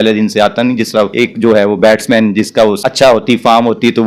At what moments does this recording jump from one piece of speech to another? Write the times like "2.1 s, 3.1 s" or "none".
1.1 s, 2.8 s